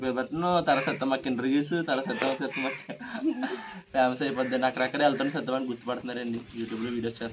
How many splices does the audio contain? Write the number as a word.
zero